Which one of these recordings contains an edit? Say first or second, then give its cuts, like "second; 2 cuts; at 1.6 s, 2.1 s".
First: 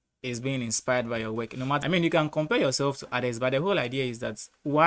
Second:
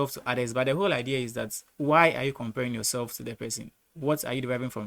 first; 1 cut; at 1.8 s